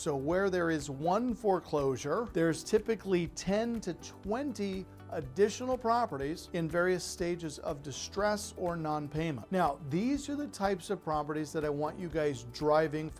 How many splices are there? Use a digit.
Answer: 3